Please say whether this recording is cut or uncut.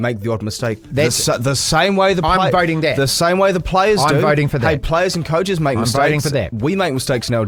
uncut